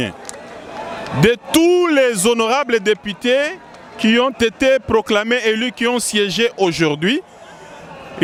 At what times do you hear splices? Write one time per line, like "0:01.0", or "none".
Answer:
none